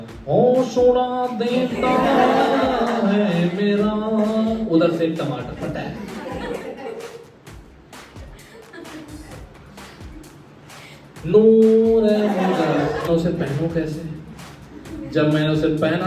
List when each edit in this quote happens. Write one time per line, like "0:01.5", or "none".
0:13.1